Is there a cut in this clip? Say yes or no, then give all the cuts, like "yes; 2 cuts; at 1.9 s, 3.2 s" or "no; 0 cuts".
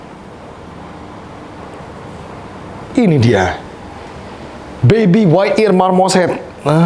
no; 0 cuts